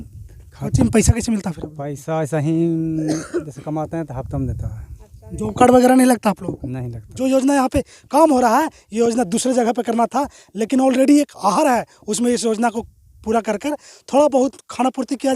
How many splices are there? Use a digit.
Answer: 1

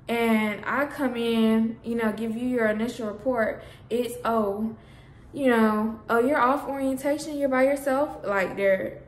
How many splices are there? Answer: 0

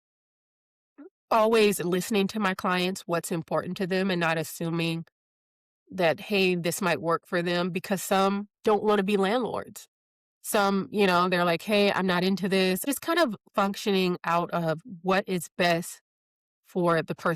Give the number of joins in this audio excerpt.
1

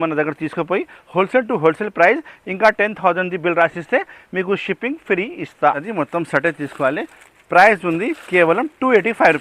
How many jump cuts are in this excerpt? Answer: 1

